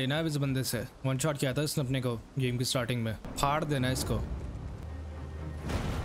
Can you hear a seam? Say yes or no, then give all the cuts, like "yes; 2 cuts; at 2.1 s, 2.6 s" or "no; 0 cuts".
yes; 3 cuts; at 0.9 s, 3.3 s, 4.8 s